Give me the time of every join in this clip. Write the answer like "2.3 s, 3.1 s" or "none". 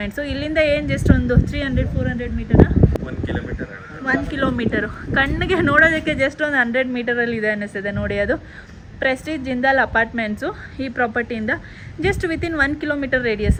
none

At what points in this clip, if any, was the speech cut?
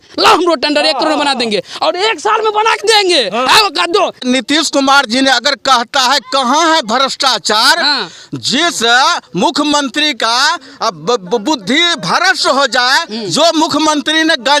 4.2 s

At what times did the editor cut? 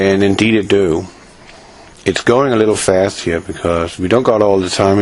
1.2 s

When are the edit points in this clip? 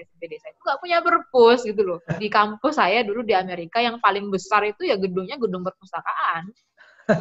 2.2 s

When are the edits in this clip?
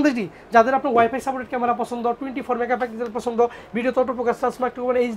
none

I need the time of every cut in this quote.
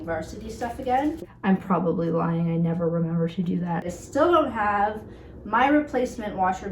1.3 s, 3.9 s

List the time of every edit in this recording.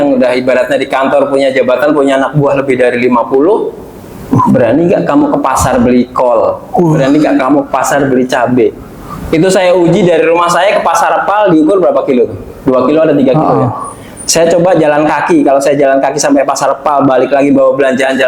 none

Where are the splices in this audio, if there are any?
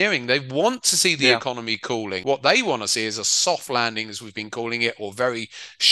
2.1 s

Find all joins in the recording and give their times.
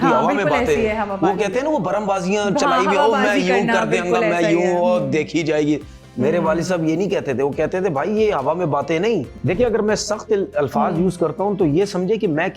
9.3 s

